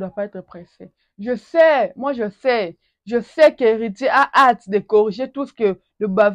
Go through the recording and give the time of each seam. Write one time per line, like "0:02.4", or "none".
none